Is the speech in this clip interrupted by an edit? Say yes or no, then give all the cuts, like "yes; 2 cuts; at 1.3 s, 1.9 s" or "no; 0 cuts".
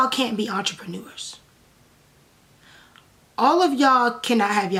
no; 0 cuts